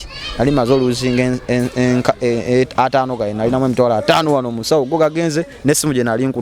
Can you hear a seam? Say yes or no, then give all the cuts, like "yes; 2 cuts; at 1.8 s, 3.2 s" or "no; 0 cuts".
no; 0 cuts